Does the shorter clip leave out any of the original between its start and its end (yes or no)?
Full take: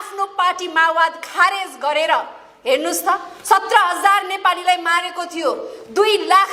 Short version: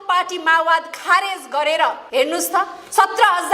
yes